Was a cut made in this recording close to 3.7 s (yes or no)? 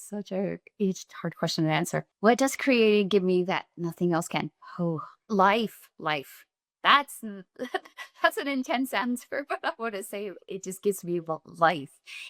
no